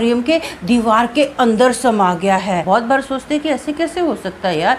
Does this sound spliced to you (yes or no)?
yes